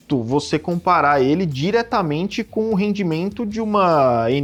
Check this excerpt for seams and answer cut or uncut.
uncut